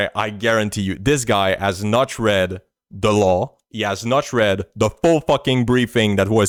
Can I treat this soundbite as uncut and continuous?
yes; 0 cuts

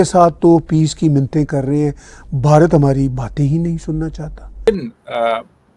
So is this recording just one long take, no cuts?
no; 1 cut; at 4.7 s

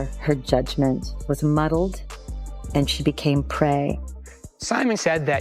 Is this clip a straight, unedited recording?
no; 1 cut; at 4.5 s

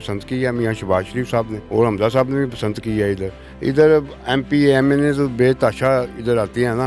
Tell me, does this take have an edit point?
yes; 1 cut; at 1.6 s

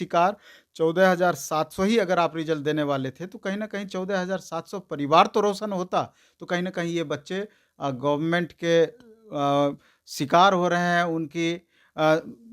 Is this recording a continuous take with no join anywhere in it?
yes; 0 cuts

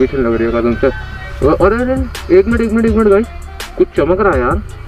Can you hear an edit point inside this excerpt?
no; 0 cuts

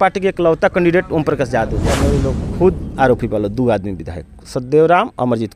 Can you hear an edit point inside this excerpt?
yes; 1 cut; at 2.1 s

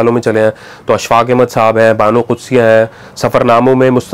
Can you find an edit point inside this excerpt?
no; 0 cuts

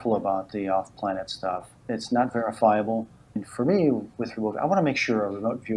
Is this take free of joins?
no; 2 cuts; at 1.7 s, 3.4 s

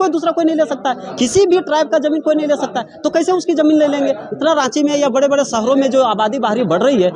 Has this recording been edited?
no; 0 cuts

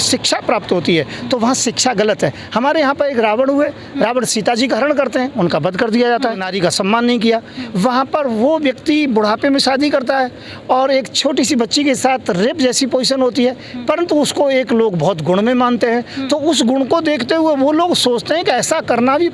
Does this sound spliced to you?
yes; 1 cut; at 6.5 s

